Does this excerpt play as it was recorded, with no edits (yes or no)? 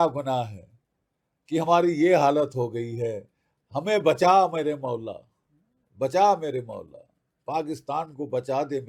yes